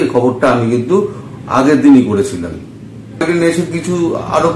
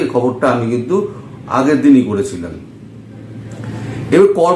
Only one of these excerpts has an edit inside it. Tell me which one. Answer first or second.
first